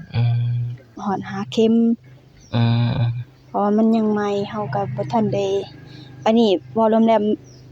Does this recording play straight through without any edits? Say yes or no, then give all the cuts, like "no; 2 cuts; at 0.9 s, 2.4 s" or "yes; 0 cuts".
no; 1 cut; at 1.0 s